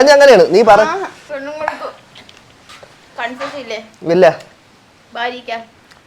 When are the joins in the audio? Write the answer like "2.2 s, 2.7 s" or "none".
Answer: 1.2 s